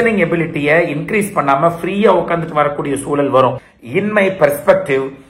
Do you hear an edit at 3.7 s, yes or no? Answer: yes